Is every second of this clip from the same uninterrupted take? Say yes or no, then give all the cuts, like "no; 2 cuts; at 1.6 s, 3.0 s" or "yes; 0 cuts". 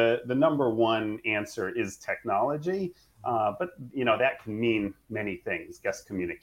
yes; 0 cuts